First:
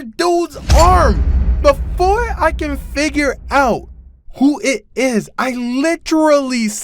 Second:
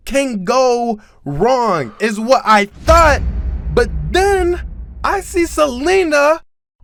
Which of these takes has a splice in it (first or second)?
first